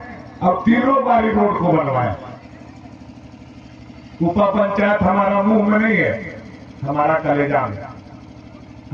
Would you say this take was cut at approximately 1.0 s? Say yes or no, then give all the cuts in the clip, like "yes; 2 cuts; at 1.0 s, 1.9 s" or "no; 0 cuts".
no; 1 cut; at 2.4 s